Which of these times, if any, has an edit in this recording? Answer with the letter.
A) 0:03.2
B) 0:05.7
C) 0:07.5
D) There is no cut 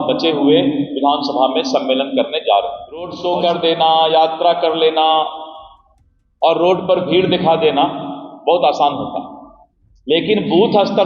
A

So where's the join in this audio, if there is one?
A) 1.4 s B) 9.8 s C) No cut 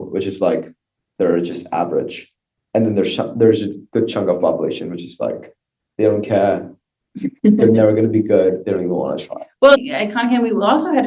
B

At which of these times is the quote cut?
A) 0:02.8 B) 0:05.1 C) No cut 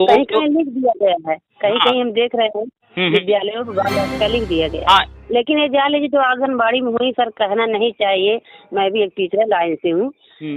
B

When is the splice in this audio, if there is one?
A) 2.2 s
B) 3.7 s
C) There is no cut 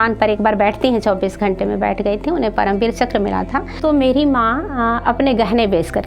B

